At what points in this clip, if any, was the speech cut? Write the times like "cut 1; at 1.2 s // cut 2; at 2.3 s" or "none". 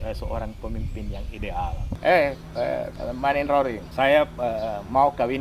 cut 1; at 1.9 s // cut 2; at 2.9 s // cut 3; at 3.8 s

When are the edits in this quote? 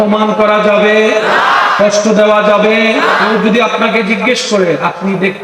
cut 1; at 3.3 s

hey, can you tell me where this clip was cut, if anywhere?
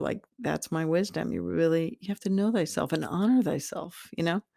none

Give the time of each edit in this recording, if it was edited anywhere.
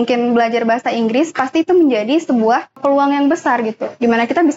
cut 1; at 2.8 s

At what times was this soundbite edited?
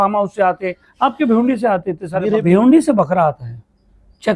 cut 1; at 2.4 s

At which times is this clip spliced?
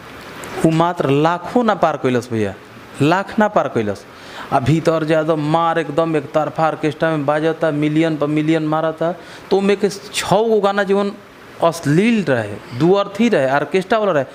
none

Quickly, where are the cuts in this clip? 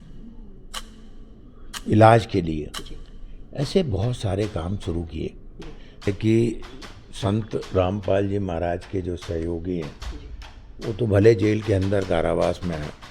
cut 1; at 6.1 s

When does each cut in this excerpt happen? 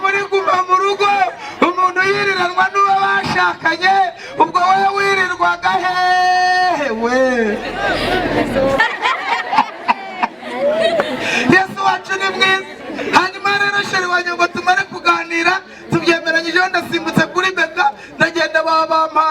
cut 1; at 8.8 s

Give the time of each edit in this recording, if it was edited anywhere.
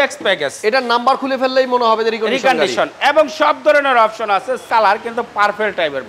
cut 1; at 4.6 s

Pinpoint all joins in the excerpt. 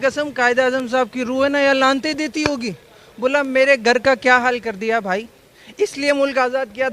none

